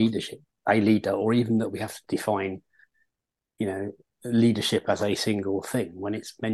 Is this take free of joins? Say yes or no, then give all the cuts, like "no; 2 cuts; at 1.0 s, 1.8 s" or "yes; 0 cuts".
yes; 0 cuts